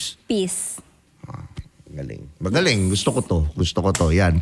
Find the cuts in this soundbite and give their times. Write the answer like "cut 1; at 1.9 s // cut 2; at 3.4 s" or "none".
none